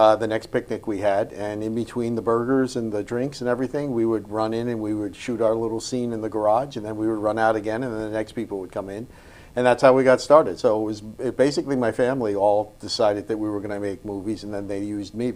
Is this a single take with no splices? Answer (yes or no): yes